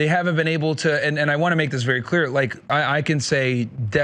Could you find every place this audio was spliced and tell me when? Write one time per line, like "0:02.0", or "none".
0:02.6